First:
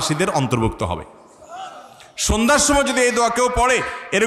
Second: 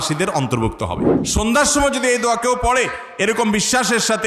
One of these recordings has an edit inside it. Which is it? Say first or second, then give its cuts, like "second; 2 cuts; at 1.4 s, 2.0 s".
second; 1 cut; at 1.1 s